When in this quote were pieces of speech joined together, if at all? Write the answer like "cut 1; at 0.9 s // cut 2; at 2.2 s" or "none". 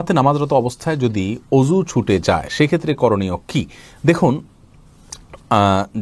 none